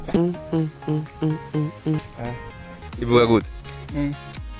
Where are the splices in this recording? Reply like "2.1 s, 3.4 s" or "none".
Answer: 2.9 s